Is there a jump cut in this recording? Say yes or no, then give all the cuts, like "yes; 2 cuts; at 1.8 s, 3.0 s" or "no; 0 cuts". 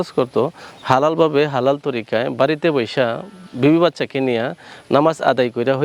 no; 0 cuts